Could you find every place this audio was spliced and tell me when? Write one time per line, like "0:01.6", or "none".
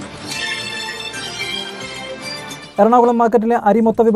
0:02.2